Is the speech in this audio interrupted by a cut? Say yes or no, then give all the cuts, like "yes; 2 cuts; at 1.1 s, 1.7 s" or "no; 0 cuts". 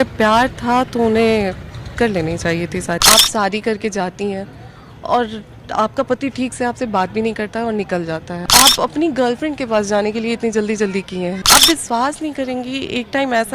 yes; 3 cuts; at 3.0 s, 8.4 s, 11.4 s